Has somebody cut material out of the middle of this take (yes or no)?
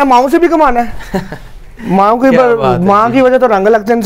no